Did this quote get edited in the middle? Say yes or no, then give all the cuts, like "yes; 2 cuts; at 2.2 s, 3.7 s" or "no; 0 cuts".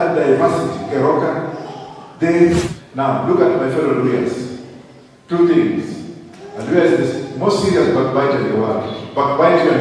yes; 1 cut; at 2.7 s